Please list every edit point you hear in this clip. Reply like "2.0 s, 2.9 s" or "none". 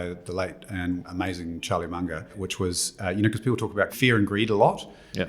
1.1 s, 2.3 s, 3.9 s